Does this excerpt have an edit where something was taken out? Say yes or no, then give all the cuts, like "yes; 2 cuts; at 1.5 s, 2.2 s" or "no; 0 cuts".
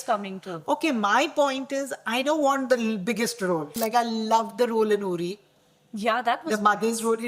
yes; 1 cut; at 3.8 s